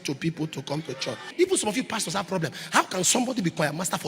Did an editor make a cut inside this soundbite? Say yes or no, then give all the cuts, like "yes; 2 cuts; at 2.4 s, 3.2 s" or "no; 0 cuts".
yes; 1 cut; at 1.3 s